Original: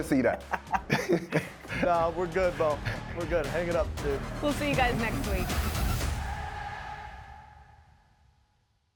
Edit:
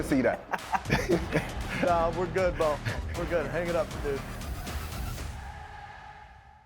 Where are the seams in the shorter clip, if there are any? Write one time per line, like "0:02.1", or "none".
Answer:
0:04.3